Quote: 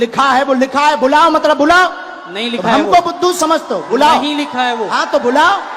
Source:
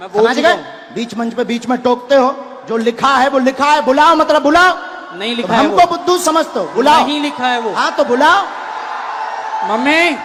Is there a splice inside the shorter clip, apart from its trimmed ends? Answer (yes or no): no